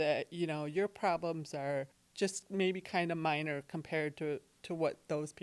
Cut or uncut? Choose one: cut